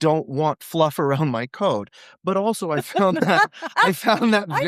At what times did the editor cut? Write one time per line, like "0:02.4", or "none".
none